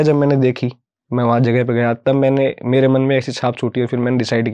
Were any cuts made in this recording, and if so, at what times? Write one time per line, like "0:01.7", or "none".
none